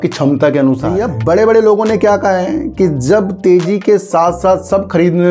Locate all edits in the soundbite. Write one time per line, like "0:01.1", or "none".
0:01.0